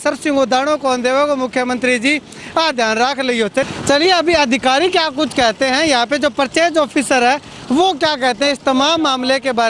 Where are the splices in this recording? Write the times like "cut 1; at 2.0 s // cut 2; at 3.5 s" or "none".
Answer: none